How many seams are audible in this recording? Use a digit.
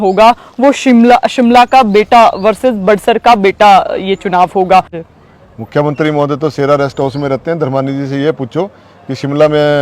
1